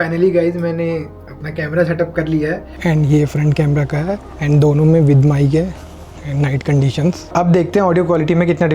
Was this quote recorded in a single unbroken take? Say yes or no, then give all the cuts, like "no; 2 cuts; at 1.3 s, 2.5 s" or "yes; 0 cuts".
no; 3 cuts; at 2.7 s, 4.3 s, 7.3 s